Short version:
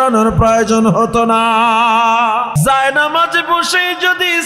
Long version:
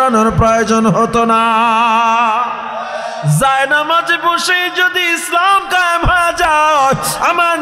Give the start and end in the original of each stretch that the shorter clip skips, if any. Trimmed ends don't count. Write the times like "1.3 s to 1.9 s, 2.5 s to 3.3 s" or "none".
2.5 s to 3.3 s

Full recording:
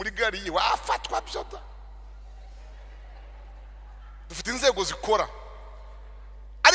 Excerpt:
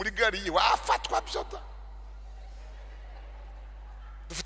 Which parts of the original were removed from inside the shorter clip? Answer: none

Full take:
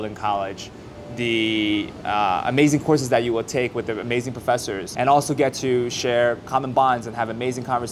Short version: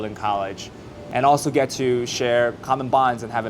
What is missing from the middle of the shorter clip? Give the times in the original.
1.0 s to 4.9 s

